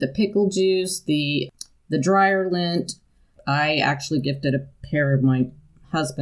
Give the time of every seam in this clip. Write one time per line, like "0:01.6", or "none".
0:01.5
0:03.4